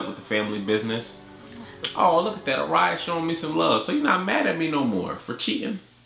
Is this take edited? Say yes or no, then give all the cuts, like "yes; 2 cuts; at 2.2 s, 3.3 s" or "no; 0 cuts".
no; 0 cuts